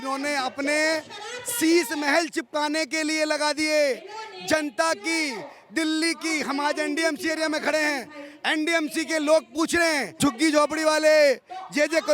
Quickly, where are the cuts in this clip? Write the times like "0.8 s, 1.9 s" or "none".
10.2 s